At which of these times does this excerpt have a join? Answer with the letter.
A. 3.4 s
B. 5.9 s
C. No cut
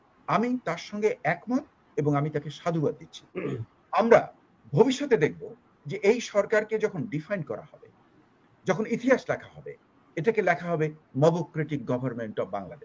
A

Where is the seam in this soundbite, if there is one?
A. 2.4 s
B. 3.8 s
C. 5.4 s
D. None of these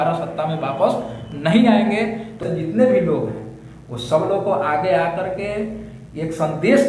A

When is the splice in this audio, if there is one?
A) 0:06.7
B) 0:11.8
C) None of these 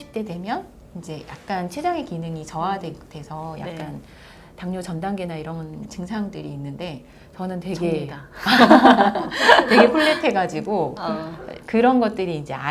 C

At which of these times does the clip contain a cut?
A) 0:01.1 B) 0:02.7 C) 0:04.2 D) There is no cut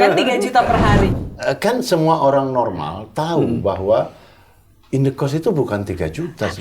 A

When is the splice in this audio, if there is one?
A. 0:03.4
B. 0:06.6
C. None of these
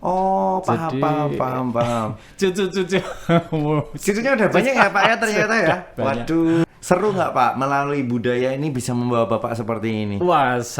B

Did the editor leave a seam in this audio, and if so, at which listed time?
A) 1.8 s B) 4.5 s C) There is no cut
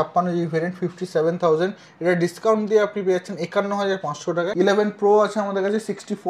B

